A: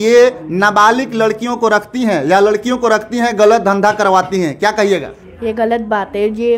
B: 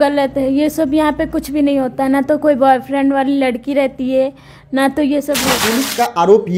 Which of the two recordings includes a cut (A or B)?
B